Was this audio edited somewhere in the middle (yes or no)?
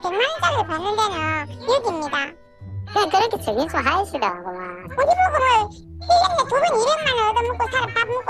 no